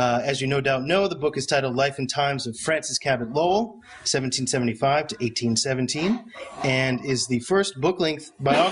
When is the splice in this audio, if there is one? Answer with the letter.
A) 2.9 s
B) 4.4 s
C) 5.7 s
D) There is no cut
C